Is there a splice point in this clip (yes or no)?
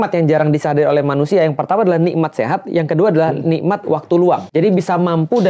yes